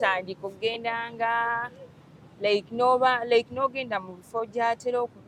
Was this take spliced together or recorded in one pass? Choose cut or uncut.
uncut